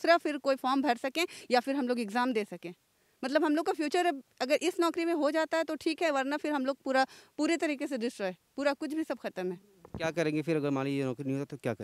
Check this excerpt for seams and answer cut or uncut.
uncut